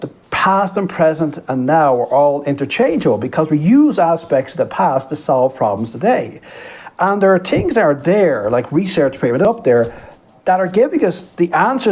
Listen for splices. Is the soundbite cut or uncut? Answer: cut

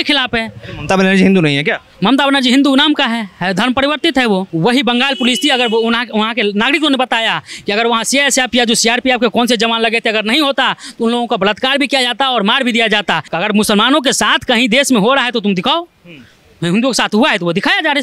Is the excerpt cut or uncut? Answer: cut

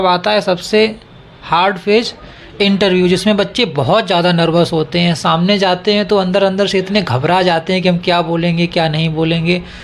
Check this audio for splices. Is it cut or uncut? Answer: uncut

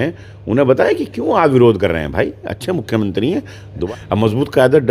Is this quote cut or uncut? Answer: cut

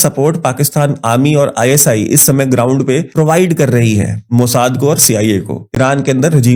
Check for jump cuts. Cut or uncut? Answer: uncut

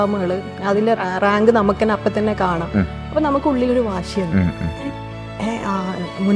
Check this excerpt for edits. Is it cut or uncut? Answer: cut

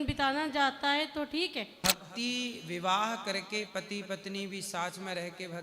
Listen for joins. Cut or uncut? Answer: cut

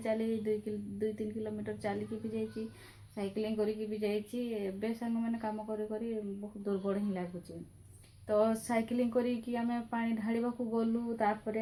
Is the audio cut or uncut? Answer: uncut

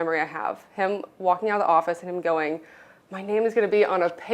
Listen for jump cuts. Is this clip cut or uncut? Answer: uncut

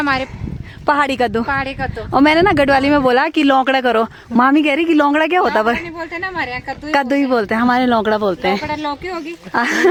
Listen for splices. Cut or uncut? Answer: uncut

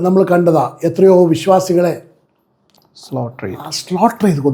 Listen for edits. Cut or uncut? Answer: uncut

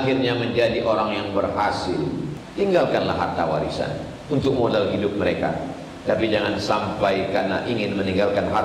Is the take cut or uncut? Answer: cut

